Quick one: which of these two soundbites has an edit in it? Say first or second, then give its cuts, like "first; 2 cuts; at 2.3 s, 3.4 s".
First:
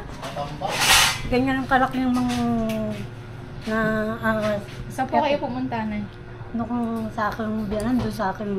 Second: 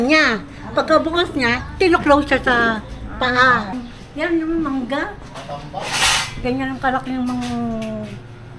second; 1 cut; at 3.7 s